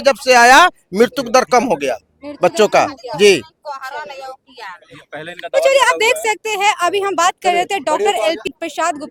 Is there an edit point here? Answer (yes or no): no